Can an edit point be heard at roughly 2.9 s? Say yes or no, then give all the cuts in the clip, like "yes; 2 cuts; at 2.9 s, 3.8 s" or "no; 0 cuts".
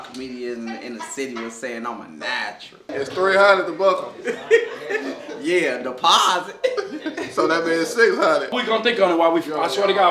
yes; 2 cuts; at 2.9 s, 8.6 s